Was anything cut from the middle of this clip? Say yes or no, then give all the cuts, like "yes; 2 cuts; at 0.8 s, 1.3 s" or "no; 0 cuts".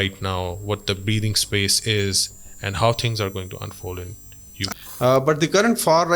yes; 1 cut; at 4.7 s